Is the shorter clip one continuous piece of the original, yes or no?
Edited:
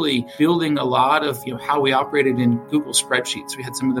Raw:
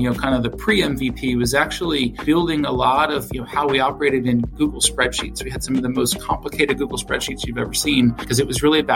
yes